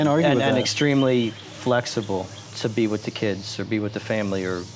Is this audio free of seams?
no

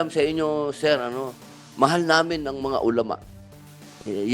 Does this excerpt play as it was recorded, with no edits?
yes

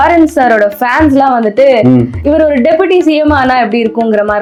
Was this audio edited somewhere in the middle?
no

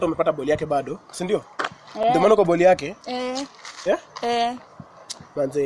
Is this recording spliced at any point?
no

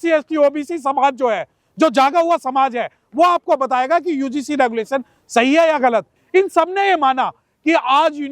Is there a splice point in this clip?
yes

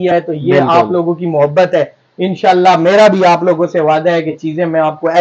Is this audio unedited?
yes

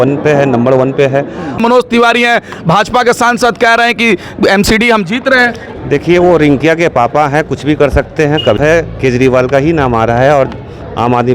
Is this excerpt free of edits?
no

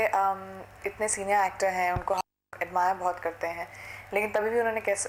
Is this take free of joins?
yes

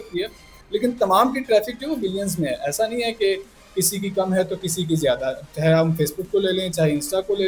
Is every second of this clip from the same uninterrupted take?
yes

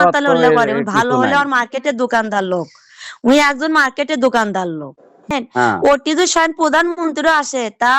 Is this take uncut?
no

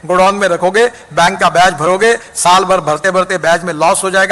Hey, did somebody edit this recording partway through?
no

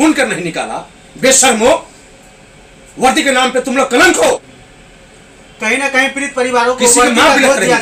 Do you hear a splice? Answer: no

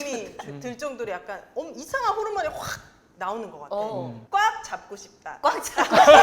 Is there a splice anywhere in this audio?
yes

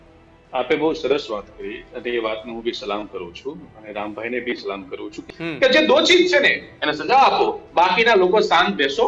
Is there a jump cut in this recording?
yes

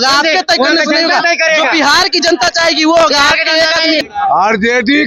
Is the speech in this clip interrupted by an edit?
yes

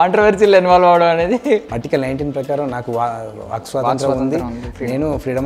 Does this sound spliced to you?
yes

